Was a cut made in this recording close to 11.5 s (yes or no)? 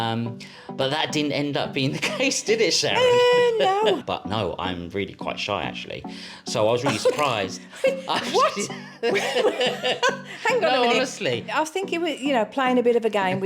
yes